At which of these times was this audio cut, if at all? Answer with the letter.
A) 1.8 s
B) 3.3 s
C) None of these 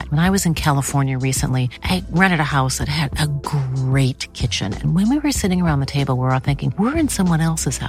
C